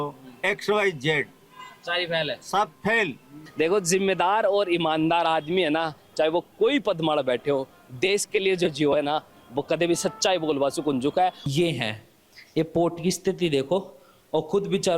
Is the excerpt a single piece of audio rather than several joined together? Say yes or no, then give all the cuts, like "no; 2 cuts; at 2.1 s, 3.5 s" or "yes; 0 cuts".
no; 2 cuts; at 3.4 s, 11.4 s